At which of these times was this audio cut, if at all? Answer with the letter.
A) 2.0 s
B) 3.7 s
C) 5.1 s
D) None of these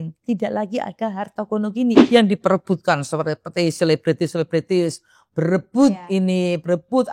A